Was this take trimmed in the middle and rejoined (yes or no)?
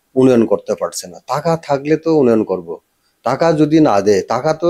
no